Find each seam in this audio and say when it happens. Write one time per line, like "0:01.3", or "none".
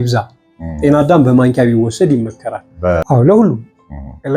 0:03.0